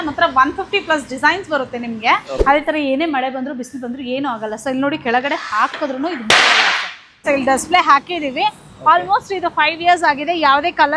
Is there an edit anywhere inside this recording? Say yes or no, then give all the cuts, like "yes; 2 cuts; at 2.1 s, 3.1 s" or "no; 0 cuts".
yes; 2 cuts; at 2.3 s, 7.2 s